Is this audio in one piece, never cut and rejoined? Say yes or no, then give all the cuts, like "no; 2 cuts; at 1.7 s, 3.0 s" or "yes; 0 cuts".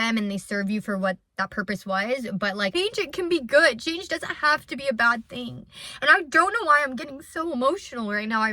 no; 1 cut; at 2.7 s